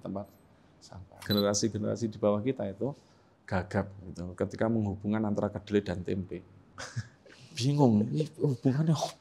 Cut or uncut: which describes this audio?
cut